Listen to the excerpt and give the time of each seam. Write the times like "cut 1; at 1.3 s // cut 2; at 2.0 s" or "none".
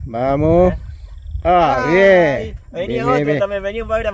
cut 1; at 1.4 s

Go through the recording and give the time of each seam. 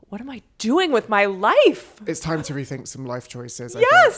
none

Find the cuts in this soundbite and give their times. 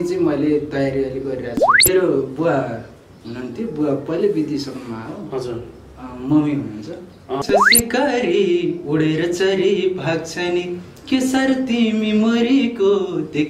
cut 1; at 1.9 s // cut 2; at 7.4 s

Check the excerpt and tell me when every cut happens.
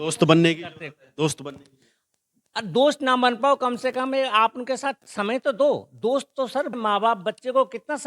cut 1; at 6.7 s

